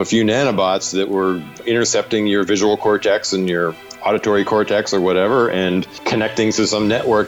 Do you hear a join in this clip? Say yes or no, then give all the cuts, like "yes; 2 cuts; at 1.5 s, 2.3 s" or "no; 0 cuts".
yes; 2 cuts; at 1.6 s, 6.0 s